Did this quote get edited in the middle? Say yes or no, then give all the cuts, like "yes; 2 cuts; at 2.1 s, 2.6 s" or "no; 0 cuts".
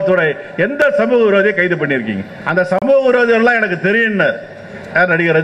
yes; 1 cut; at 2.8 s